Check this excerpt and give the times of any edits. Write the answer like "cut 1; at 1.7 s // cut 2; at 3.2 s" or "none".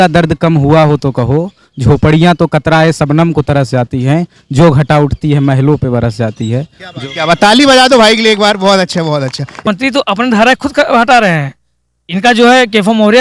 cut 1; at 9.6 s